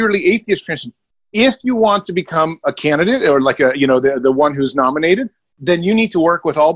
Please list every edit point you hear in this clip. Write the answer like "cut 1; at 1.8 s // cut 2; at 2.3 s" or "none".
cut 1; at 5.6 s